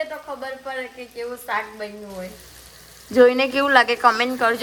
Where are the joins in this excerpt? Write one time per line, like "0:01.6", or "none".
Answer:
none